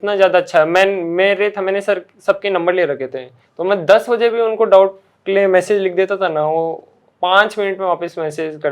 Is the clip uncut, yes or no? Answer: yes